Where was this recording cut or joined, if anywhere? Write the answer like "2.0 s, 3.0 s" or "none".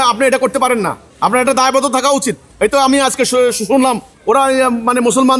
1.0 s, 2.4 s, 4.1 s

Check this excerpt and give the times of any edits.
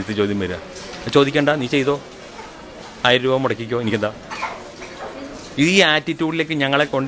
none

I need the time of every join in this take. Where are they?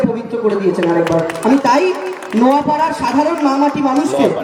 none

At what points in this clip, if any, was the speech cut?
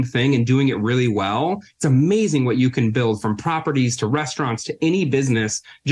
none

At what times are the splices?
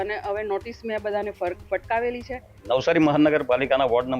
2.5 s

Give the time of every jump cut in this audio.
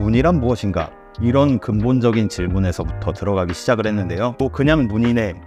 4.3 s

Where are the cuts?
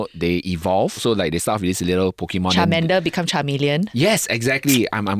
1.0 s

